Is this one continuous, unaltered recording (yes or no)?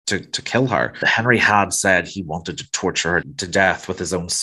no